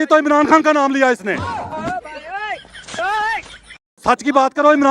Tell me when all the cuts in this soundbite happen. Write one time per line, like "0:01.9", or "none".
0:01.6
0:04.0